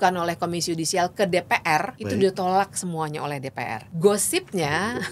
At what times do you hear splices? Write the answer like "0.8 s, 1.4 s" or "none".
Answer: 2.0 s, 3.8 s